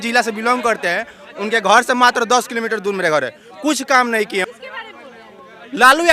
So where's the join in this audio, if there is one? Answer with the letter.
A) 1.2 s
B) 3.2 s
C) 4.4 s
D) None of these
C